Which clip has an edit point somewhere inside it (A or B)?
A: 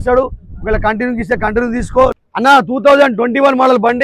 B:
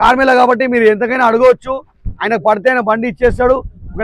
A